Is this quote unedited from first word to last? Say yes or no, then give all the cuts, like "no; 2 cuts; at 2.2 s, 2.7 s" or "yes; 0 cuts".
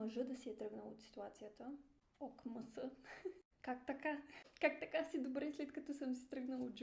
no; 3 cuts; at 2.0 s, 3.5 s, 4.3 s